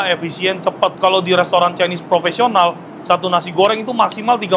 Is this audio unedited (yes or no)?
yes